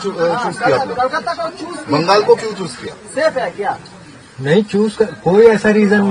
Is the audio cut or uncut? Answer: uncut